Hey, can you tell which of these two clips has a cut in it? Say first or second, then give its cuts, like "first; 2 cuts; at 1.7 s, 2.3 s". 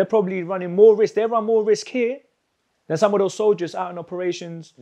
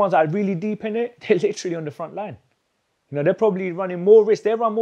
second; 1 cut; at 1.2 s